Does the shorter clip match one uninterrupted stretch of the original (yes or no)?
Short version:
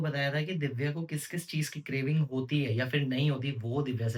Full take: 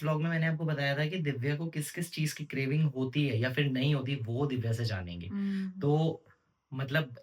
yes